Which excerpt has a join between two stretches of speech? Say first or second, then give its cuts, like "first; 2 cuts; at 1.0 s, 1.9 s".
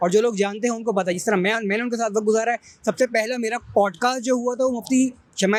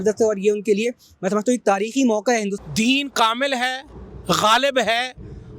second; 1 cut; at 2.5 s